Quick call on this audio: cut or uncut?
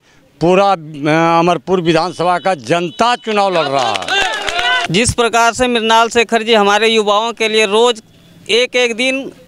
uncut